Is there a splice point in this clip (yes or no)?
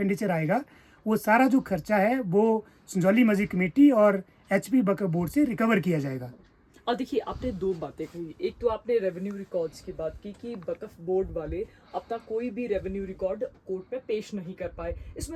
no